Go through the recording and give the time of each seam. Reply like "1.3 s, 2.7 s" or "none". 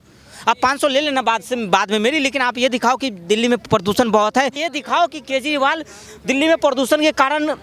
4.6 s